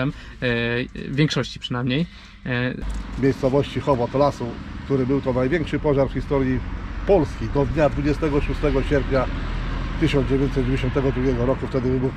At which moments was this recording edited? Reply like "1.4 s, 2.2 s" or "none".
2.9 s